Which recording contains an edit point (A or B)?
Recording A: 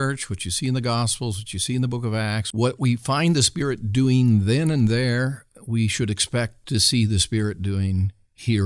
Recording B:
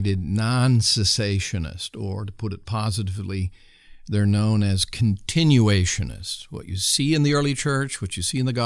A